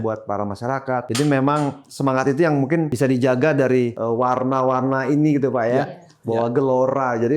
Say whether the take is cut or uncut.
cut